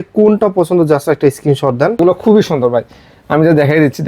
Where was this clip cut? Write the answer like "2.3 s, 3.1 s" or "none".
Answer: 2.0 s